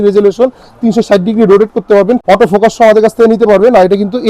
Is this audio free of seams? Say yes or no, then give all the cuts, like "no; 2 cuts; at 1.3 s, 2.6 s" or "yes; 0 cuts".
no; 1 cut; at 2.2 s